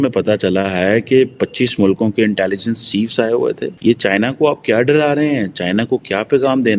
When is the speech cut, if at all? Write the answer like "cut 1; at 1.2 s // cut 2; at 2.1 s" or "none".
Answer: cut 1; at 3.7 s